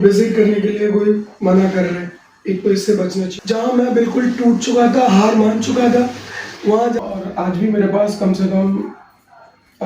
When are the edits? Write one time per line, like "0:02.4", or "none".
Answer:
0:03.3
0:07.0